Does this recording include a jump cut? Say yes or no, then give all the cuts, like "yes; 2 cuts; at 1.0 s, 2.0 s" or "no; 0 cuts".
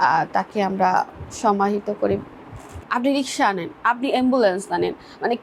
yes; 1 cut; at 2.8 s